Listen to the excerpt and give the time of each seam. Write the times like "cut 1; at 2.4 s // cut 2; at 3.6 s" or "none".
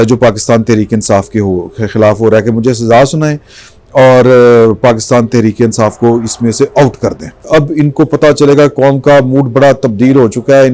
cut 1; at 7.5 s